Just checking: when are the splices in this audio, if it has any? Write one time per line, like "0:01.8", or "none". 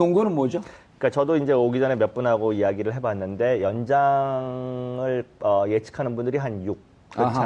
none